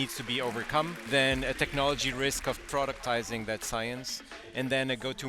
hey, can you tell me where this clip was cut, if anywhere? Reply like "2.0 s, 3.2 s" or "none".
1.0 s